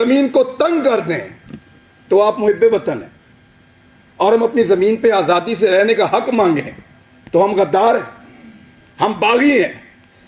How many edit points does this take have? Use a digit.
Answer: 0